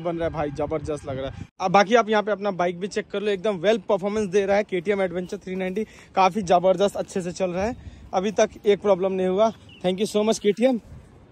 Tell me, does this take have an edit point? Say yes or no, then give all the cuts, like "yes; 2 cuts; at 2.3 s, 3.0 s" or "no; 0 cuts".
no; 0 cuts